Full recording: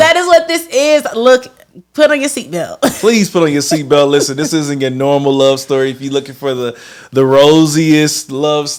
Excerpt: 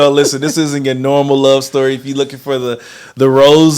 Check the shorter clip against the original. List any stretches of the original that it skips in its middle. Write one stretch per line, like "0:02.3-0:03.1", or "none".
none